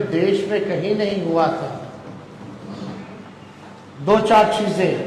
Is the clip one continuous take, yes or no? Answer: yes